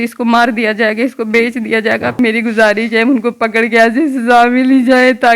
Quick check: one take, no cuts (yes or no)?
no